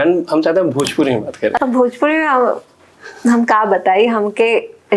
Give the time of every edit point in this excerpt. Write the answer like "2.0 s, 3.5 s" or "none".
none